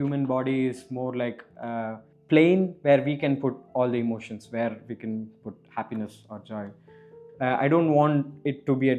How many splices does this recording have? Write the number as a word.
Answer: two